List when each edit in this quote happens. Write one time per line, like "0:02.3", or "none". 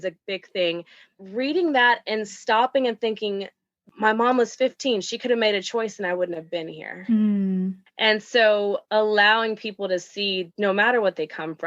0:01.1
0:07.8